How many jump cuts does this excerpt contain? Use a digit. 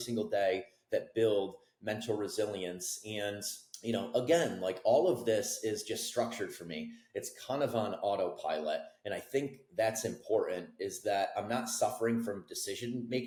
0